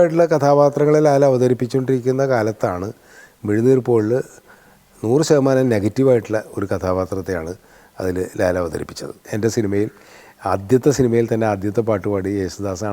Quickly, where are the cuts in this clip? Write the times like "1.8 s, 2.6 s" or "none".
9.3 s

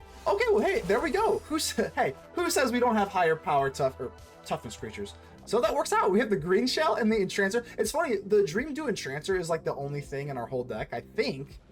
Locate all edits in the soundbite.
5.2 s

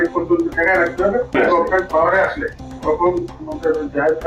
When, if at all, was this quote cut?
none

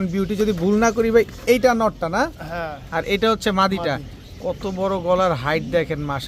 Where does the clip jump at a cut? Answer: none

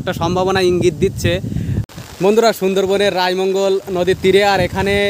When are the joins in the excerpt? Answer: 1.8 s

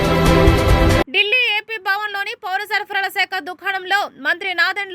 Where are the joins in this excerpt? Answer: 1.0 s

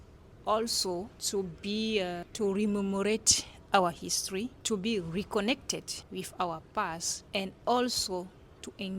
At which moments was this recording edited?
1.2 s, 2.2 s, 4.6 s, 6.0 s, 7.1 s

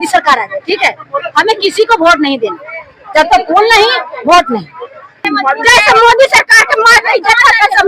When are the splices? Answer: 5.2 s

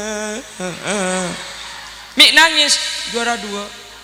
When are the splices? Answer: none

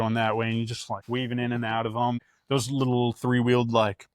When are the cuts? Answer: 0.9 s, 2.2 s

